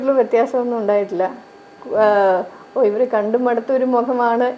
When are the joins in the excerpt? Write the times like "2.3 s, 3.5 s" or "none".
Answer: none